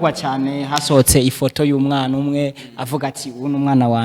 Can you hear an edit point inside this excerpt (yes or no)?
no